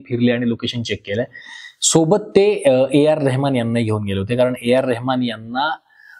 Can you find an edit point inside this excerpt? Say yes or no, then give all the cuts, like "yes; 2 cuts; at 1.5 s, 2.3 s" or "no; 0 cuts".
no; 0 cuts